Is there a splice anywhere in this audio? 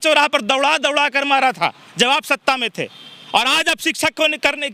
no; 0 cuts

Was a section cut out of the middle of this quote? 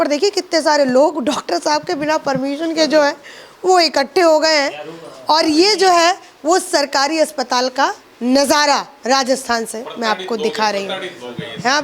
no; 0 cuts

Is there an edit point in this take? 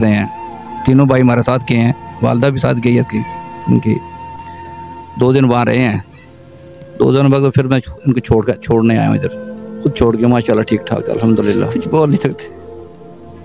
yes; 2 cuts; at 11.7 s, 12.5 s

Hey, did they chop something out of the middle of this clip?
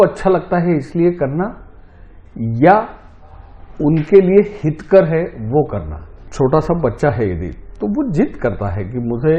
yes; 1 cut; at 6.2 s

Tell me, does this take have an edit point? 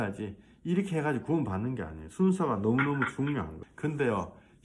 yes; 1 cut; at 3.6 s

